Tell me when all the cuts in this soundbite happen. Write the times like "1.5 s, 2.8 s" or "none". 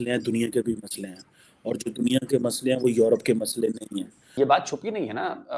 4.3 s